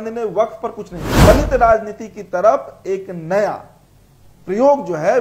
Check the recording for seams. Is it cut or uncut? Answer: cut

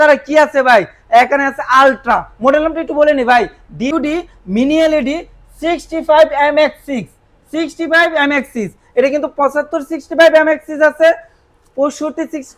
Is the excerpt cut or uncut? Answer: cut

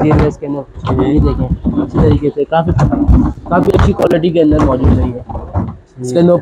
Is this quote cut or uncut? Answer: uncut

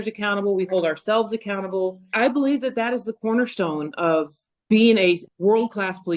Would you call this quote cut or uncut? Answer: cut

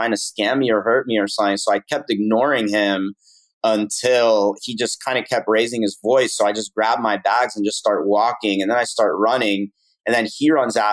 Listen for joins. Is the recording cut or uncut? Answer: uncut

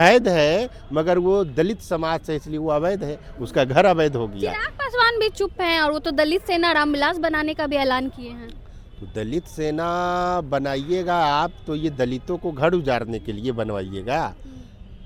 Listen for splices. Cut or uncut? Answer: uncut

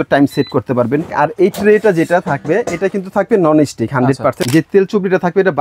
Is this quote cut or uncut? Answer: cut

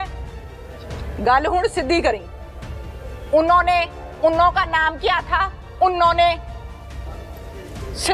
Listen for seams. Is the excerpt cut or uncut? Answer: uncut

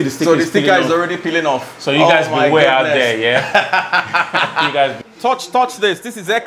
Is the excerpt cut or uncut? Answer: cut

